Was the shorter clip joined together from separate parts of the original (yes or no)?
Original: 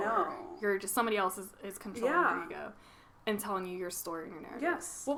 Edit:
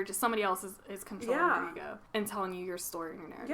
yes